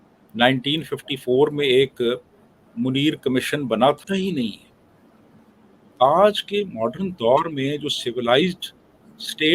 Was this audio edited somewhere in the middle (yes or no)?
yes